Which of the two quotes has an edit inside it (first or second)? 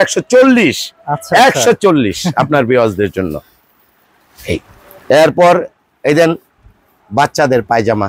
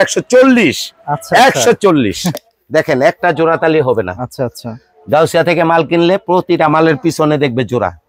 second